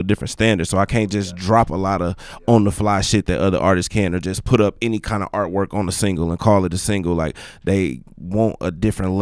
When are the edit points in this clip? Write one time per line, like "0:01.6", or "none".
none